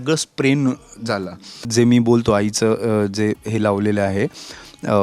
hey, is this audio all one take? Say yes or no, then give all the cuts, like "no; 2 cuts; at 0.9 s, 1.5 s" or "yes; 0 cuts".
no; 1 cut; at 1.7 s